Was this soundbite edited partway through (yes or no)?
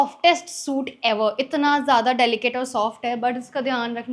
no